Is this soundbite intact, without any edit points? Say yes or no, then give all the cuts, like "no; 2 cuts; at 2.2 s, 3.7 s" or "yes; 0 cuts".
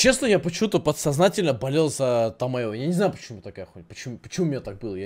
yes; 0 cuts